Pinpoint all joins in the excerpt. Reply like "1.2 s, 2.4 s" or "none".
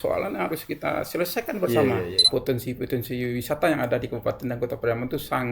2.3 s